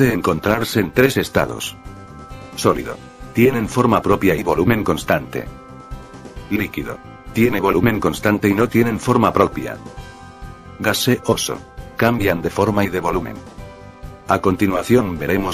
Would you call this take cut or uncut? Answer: cut